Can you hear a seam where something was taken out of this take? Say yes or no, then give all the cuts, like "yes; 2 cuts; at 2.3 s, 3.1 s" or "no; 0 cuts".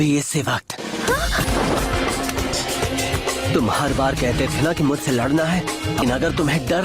yes; 1 cut; at 1.5 s